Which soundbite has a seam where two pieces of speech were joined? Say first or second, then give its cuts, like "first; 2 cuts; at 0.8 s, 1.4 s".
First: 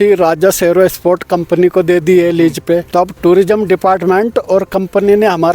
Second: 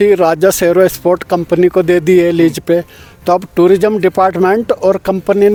first; 1 cut; at 2.9 s